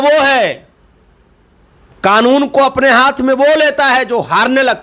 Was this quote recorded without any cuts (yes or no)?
yes